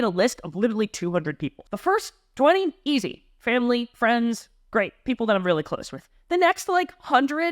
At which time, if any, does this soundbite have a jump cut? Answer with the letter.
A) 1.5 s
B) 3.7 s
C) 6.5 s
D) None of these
A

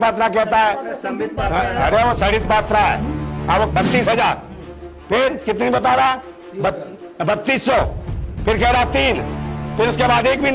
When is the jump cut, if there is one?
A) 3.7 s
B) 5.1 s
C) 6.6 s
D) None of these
A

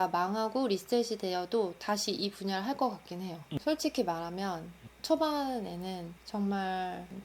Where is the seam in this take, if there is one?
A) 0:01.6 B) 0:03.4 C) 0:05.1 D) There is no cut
B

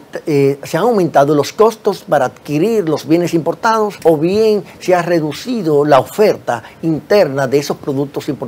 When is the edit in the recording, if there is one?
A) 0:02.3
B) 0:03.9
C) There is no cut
B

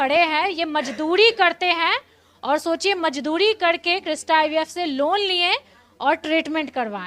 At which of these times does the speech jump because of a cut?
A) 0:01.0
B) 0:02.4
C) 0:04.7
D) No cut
D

